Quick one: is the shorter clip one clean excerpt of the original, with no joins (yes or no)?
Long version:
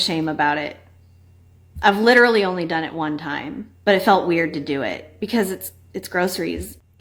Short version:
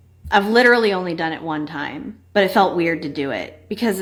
yes